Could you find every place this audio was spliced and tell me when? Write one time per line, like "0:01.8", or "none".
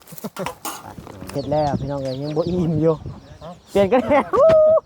0:01.3

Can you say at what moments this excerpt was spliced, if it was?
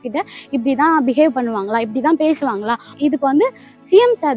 0:03.0

